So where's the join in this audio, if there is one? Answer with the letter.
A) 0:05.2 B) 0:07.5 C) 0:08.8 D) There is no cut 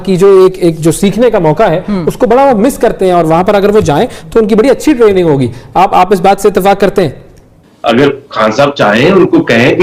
B